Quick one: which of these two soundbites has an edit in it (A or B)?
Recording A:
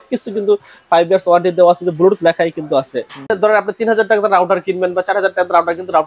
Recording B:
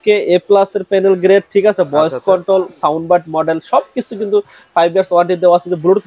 A